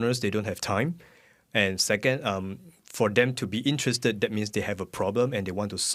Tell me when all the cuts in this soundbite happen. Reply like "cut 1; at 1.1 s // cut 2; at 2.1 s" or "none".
none